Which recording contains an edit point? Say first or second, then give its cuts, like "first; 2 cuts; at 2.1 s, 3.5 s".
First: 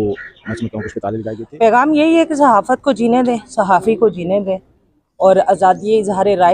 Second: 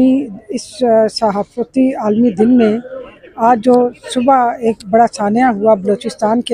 first; 1 cut; at 1.4 s